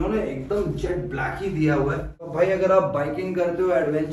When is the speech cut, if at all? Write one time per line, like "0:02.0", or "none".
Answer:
0:02.3